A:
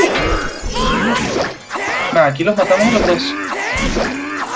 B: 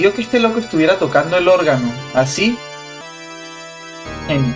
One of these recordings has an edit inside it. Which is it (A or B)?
B